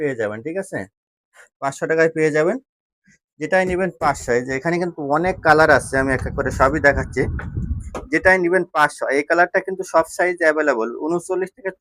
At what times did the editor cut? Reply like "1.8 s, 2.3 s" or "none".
none